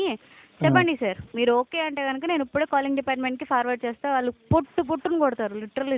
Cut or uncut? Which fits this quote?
uncut